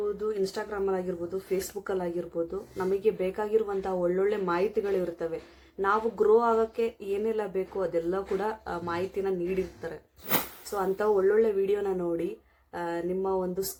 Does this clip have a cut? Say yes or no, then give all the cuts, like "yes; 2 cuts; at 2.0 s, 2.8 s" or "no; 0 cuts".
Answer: no; 0 cuts